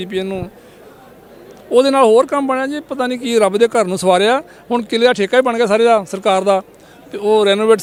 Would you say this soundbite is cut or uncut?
uncut